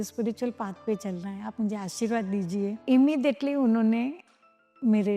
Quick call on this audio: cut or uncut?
cut